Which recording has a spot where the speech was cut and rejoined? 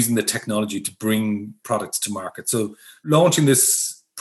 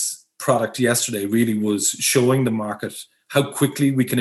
first; 2 cuts; at 1.6 s, 2.9 s

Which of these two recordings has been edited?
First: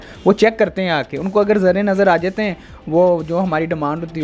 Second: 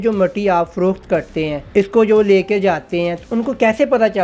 second; 1 cut; at 1.6 s

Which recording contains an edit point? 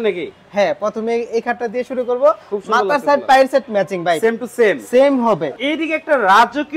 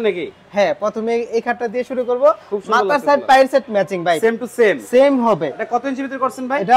first; 1 cut; at 5.5 s

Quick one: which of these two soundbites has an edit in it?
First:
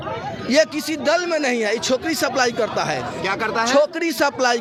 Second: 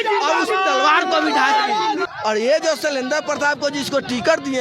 second; 1 cut; at 2.1 s

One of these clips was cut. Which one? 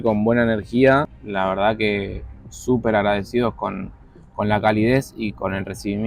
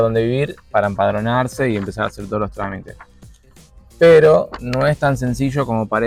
first; 1 cut; at 1.2 s

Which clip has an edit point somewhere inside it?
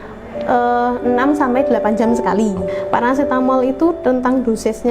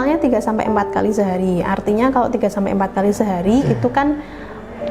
first; 1 cut; at 2.7 s

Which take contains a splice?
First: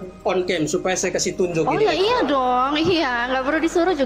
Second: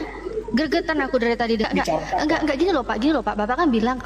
second; 1 cut; at 1.6 s

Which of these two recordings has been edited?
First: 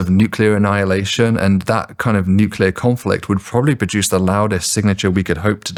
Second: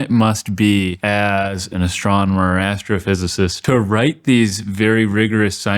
second; 2 cuts; at 1.0 s, 3.6 s

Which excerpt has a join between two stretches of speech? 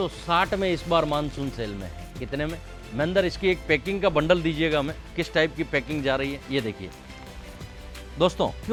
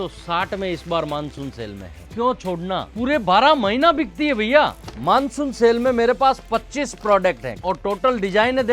second; 3 cuts; at 2.1 s, 4.8 s, 7.5 s

